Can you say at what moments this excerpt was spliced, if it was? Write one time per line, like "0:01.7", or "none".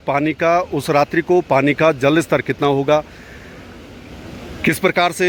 none

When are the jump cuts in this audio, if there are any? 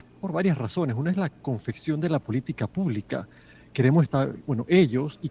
none

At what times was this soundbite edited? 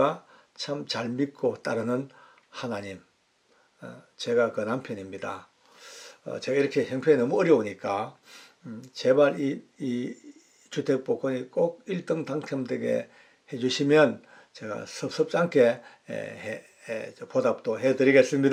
none

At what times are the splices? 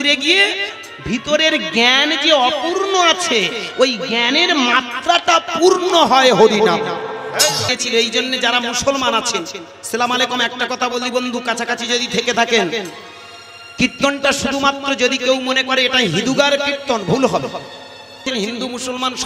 0:07.6
0:18.2

